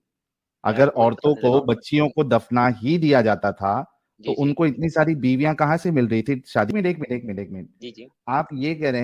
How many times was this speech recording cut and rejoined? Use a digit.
1